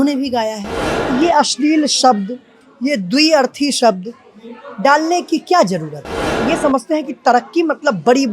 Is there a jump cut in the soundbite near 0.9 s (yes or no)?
yes